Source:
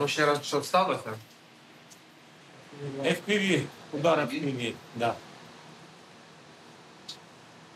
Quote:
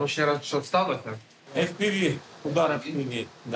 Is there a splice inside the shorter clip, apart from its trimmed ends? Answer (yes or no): yes